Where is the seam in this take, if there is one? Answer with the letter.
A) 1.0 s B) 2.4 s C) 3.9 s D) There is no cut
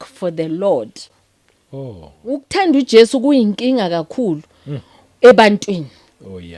B